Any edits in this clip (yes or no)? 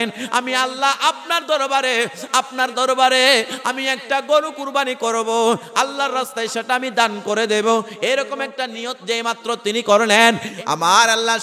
yes